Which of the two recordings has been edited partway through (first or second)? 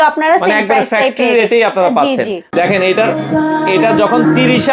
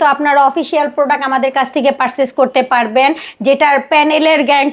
first